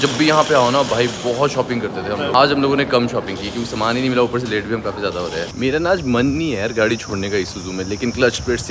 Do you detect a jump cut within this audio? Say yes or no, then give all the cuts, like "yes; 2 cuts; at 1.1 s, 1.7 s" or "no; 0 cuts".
no; 0 cuts